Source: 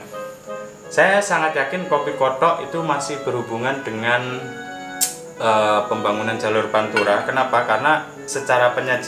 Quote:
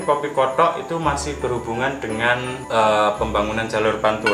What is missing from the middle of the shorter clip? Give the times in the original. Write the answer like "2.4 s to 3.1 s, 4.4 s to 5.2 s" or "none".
4.4 s to 5.3 s